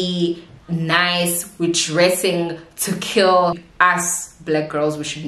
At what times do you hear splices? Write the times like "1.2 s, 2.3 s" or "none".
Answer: 3.7 s